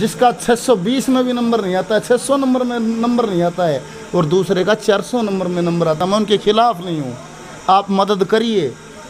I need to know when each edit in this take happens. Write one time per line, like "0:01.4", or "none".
none

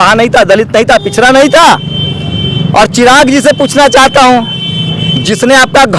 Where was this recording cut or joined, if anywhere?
none

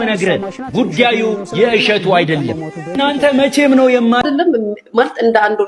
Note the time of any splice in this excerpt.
0:04.2

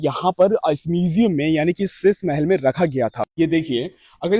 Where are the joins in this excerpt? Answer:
0:03.2

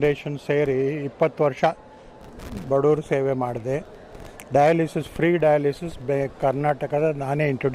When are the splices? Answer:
none

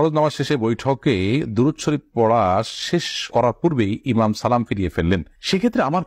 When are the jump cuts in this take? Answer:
none

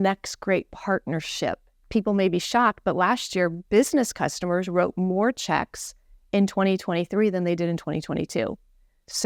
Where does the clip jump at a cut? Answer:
0:01.8

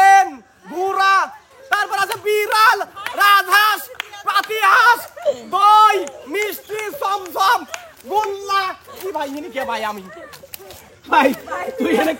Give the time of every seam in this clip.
0:01.5

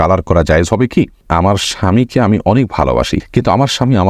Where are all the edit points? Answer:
0:01.3

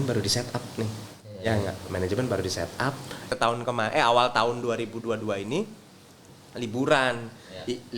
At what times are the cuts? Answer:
0:03.3

